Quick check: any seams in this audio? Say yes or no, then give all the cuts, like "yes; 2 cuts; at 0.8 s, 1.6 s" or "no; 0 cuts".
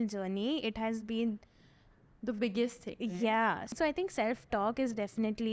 yes; 1 cut; at 3.8 s